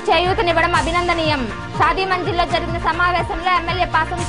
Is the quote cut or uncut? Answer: uncut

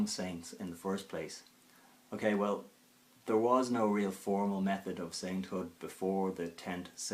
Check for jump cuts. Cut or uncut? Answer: cut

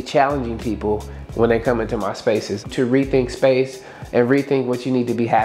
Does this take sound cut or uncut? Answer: uncut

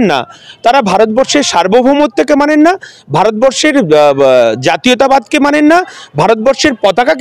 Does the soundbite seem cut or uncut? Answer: uncut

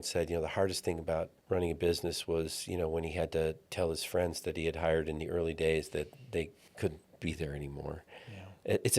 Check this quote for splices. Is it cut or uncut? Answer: cut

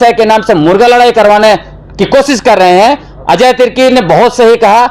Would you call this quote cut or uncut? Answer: uncut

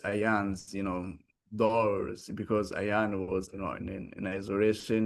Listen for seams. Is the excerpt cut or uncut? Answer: uncut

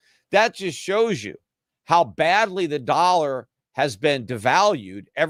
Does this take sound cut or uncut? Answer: uncut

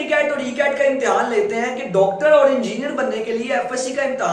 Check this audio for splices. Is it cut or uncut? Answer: uncut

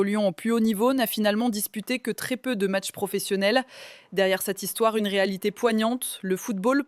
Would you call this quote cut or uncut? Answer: uncut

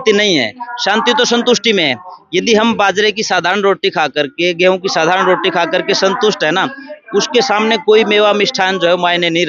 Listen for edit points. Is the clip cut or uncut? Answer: uncut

